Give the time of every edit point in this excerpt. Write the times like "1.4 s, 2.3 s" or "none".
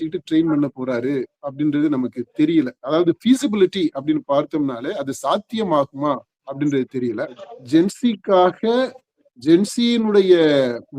7.5 s